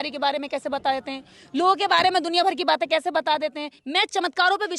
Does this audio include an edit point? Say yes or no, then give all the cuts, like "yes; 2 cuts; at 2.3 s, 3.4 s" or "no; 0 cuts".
yes; 1 cut; at 3.7 s